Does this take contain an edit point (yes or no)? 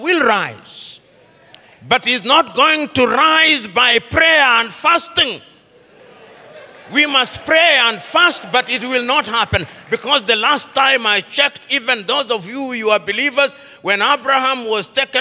no